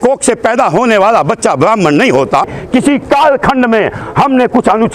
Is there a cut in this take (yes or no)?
yes